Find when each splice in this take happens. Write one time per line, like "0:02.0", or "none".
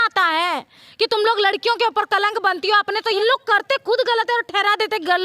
0:03.1